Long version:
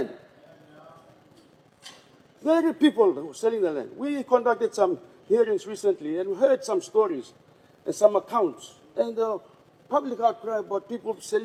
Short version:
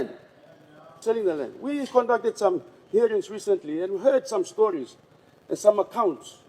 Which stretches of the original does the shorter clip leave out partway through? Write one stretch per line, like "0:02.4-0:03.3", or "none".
0:00.9-0:03.3

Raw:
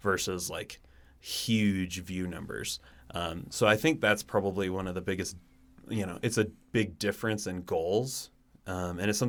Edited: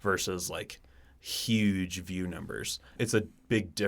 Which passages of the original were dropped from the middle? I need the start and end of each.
0:02.9-0:06.1

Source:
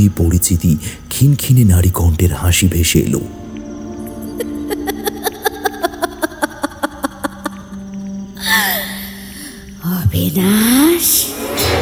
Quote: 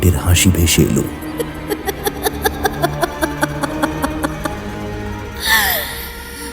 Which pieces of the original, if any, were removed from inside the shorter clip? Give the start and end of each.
0:03.5-0:04.3

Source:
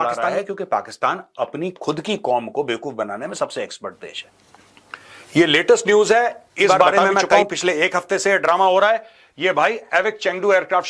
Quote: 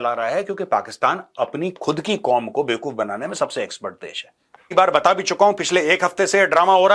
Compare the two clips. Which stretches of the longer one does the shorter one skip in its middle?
0:04.8-0:06.7

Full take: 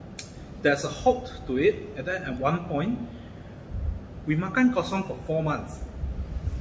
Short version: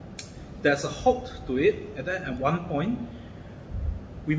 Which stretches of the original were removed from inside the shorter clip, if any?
none

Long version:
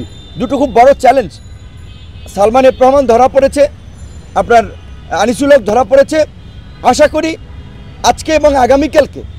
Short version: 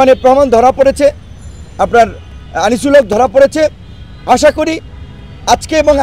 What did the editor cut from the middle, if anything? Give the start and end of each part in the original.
none

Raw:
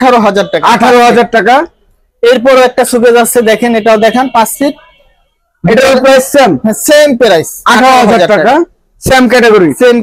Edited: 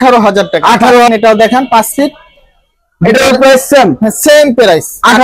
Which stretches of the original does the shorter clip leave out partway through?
0:01.1-0:03.7

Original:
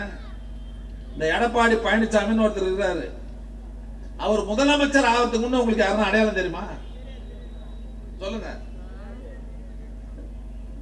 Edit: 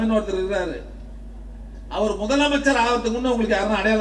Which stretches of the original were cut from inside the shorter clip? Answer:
none

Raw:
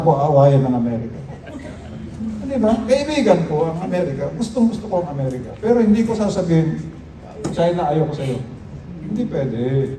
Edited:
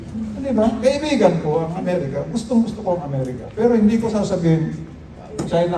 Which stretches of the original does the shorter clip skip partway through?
none

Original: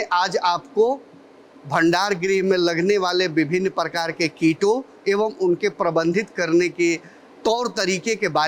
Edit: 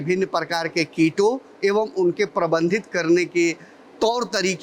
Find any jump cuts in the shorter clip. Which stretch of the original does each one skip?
none

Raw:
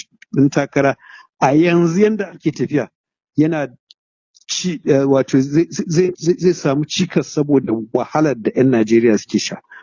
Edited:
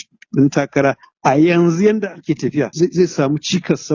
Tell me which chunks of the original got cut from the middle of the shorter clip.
0:01.1-0:01.2
0:02.9-0:06.2

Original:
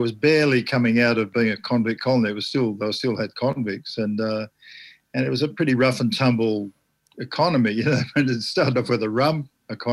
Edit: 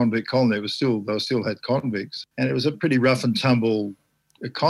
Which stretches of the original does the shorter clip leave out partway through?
0:03.8-0:04.9

